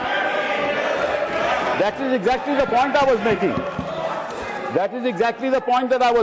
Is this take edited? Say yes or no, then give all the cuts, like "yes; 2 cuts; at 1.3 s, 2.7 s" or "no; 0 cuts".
no; 0 cuts